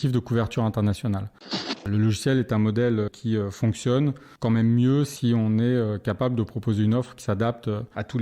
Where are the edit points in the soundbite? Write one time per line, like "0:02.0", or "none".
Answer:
0:01.8
0:03.1
0:04.3